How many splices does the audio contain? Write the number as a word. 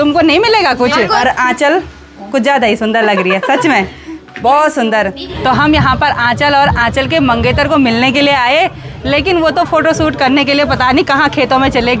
two